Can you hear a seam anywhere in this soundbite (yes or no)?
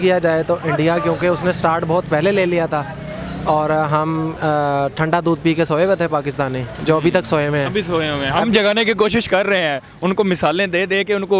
no